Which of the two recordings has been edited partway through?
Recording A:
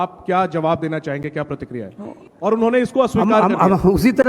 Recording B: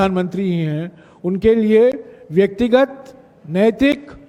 A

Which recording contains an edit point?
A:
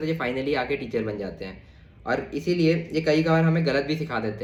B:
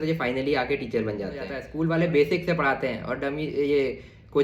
B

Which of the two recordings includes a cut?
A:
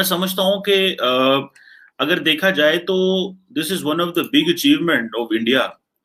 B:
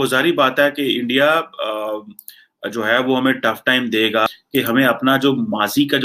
B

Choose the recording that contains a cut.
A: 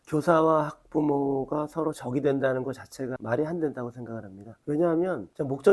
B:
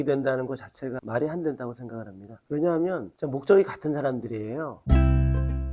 B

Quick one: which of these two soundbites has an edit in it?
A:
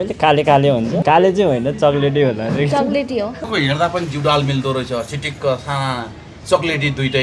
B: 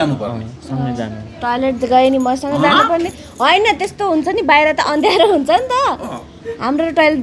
A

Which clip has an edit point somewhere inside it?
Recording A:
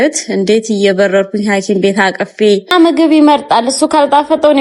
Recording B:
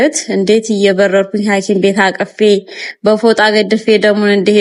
A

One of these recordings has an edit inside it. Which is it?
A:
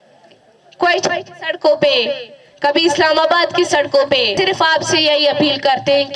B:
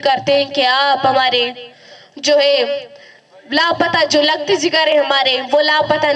A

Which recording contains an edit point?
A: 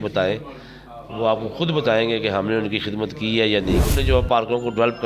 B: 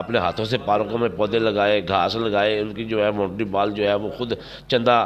A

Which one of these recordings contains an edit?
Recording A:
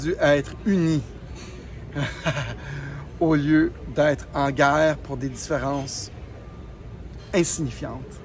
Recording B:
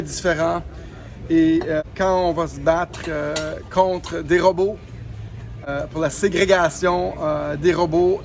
B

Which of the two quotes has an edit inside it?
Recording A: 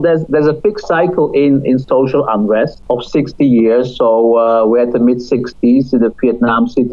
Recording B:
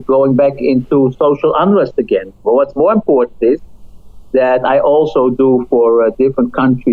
A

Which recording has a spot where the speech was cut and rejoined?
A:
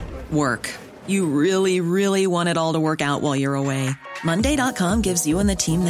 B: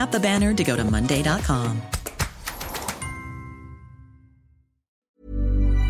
B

